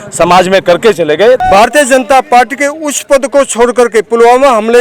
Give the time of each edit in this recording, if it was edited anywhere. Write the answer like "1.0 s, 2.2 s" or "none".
1.4 s